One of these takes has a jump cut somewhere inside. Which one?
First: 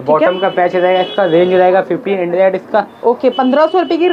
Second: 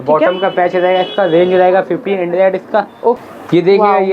second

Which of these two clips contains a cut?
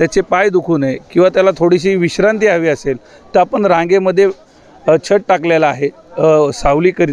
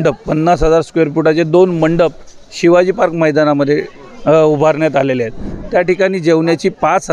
second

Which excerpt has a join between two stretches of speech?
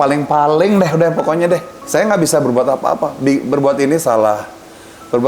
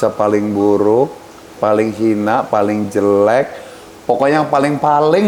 first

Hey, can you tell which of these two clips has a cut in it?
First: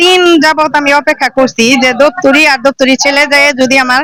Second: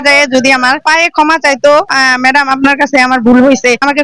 second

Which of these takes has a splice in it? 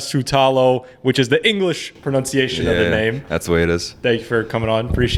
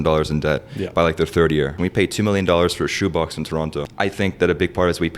second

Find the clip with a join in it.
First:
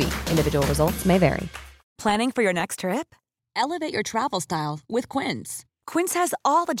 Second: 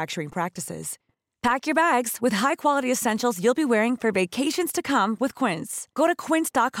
first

